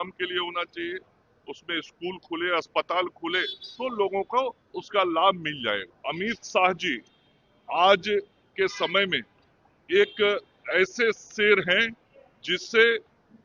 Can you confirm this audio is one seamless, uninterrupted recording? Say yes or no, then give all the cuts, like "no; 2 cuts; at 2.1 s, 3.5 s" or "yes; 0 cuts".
no; 1 cut; at 5.9 s